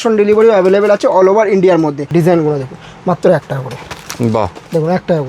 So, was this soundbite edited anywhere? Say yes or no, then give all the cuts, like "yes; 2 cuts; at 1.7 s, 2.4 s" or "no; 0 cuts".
yes; 1 cut; at 2.0 s